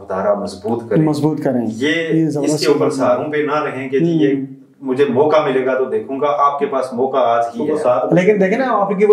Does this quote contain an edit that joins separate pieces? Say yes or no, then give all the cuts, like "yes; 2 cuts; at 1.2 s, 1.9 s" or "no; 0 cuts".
yes; 1 cut; at 7.6 s